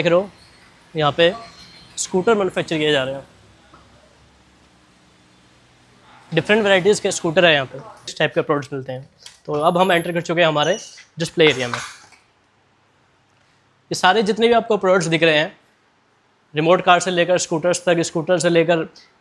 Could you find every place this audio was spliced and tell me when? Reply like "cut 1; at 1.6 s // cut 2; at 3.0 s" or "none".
cut 1; at 8.1 s